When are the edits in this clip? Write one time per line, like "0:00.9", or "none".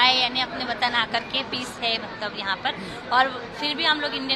none